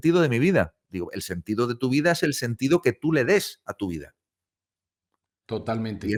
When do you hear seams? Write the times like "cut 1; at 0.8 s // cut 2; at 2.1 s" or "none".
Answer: none